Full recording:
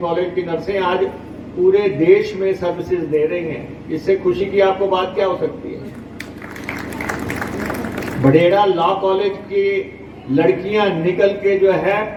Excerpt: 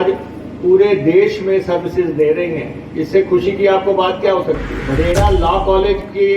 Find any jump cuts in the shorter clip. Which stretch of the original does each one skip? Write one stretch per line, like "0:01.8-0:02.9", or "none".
0:05.7-0:08.1